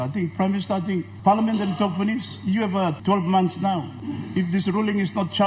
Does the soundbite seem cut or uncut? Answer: cut